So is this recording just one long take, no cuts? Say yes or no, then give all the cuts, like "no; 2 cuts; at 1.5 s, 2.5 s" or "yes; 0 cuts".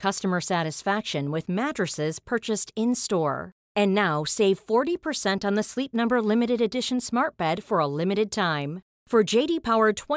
yes; 0 cuts